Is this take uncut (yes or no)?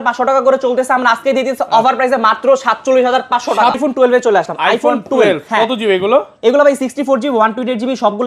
no